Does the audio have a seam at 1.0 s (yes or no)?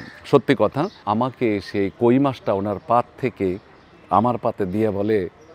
yes